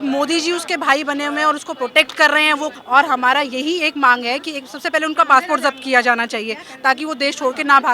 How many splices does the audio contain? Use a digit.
1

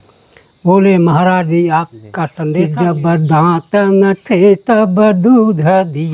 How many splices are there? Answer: 1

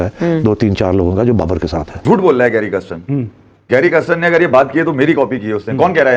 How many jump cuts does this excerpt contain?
1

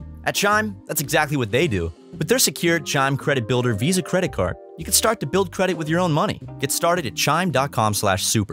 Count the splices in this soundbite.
1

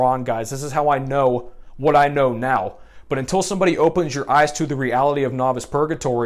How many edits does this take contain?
0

